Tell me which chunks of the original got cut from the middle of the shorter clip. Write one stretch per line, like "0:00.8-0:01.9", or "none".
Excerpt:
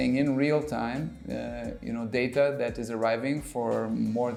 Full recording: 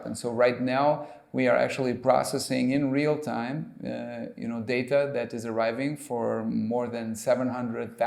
none